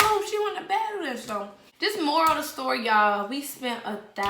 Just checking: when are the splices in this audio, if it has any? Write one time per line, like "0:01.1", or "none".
0:01.6